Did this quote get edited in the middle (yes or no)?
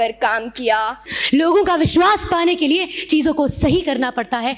yes